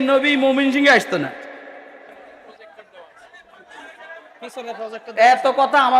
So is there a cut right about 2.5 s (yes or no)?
yes